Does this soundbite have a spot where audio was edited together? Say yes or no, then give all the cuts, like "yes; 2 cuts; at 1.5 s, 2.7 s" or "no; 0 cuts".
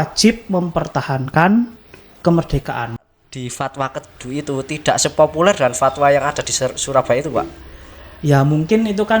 yes; 1 cut; at 3.0 s